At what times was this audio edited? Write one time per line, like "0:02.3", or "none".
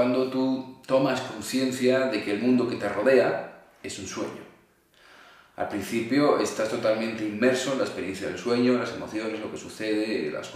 none

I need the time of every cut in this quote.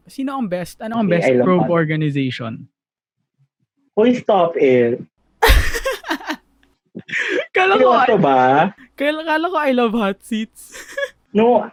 none

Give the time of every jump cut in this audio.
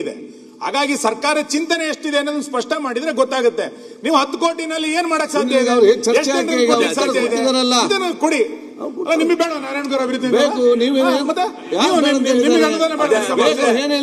none

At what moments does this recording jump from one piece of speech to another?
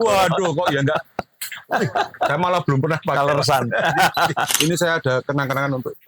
0:04.5

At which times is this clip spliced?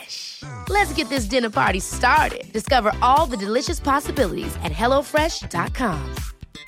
none

